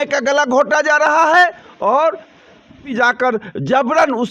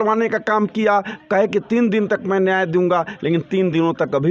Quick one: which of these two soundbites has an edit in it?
first; 1 cut; at 2.9 s

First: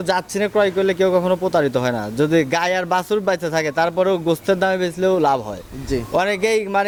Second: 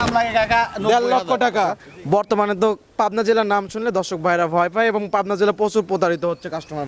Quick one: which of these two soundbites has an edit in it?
second; 1 cut; at 1.9 s

